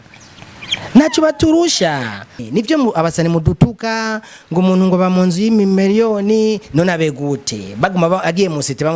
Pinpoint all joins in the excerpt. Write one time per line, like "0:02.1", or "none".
0:02.4